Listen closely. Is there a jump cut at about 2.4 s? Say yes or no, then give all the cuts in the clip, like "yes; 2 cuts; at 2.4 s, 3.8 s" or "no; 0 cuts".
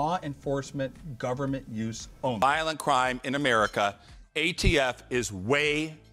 yes; 1 cut; at 2.4 s